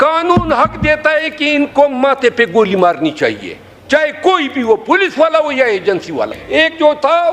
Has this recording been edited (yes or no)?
yes